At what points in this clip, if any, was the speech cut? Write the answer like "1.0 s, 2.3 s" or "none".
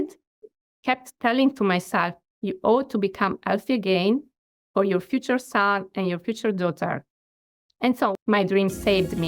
2.2 s, 8.1 s